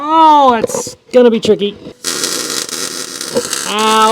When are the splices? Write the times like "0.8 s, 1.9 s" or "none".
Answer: 3.0 s